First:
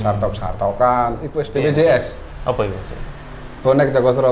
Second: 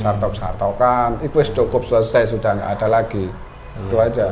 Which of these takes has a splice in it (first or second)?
first